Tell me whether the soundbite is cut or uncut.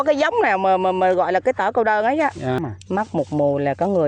cut